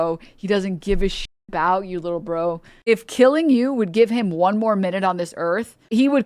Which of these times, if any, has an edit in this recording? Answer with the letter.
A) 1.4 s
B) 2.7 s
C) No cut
B